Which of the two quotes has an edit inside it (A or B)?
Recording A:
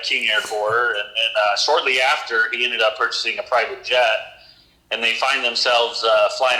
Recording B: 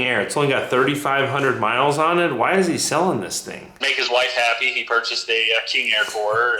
B